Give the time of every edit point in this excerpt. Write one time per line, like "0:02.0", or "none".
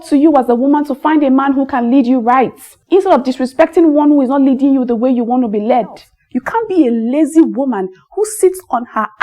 0:06.1